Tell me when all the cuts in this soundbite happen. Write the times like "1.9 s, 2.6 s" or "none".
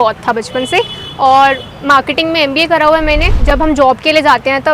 3.3 s